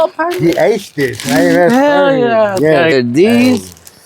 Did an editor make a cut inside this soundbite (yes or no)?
yes